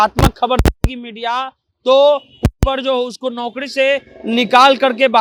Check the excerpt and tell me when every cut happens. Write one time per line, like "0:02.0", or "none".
none